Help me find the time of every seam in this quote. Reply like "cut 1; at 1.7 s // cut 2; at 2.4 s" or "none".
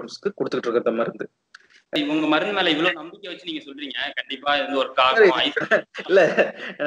cut 1; at 1.9 s